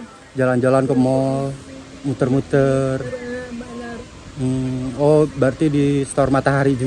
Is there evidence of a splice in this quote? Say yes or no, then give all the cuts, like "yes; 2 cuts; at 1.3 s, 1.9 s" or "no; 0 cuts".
no; 0 cuts